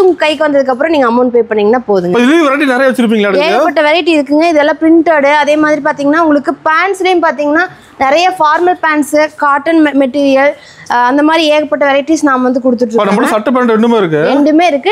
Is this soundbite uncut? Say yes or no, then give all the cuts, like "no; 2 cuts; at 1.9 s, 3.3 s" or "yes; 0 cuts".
yes; 0 cuts